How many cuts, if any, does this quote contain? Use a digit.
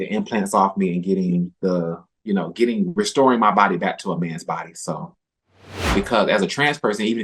1